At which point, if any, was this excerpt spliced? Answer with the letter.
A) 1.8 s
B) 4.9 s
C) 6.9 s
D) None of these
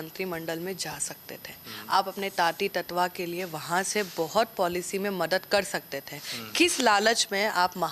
D